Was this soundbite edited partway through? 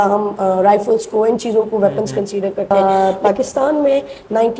yes; 1 cut; at 3.0 s

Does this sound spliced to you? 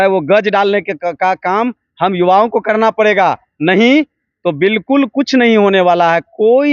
no; 0 cuts

